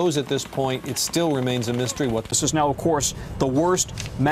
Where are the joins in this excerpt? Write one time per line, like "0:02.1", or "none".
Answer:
0:02.3